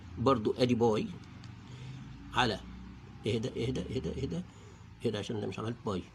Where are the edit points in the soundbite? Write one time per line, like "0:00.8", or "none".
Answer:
none

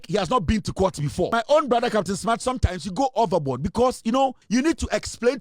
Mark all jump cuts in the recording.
0:01.3
0:04.4

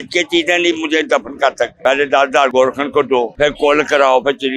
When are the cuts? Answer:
0:01.7
0:02.5
0:03.3

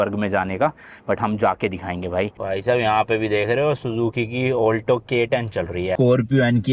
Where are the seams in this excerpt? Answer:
0:02.4
0:06.0

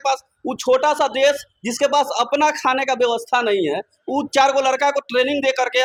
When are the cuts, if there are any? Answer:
none

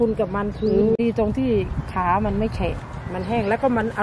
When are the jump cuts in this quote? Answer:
0:01.0

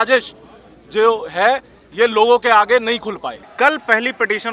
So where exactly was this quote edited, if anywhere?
0:03.4

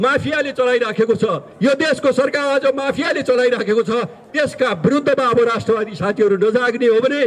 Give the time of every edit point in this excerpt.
none

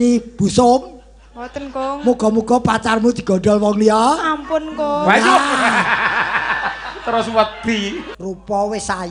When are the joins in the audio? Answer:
0:08.1

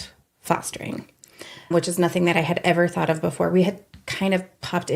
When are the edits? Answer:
0:01.7

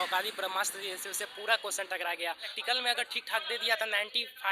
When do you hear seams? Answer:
0:02.6

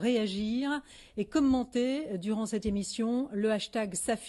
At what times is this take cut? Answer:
0:02.1

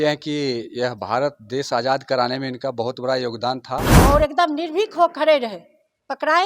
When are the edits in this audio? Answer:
0:03.9

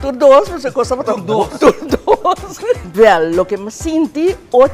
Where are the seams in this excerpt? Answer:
0:02.9

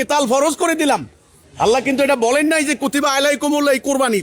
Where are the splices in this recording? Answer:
none

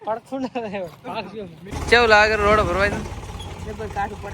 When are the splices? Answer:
0:01.7

